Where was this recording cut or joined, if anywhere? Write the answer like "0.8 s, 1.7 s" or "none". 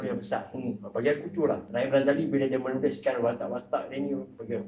1.7 s